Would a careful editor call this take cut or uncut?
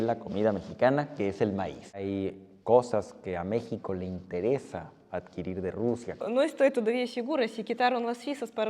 cut